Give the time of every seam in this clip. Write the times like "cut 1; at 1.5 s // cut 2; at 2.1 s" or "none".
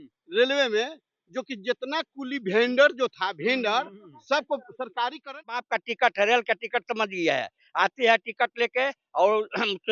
cut 1; at 5.7 s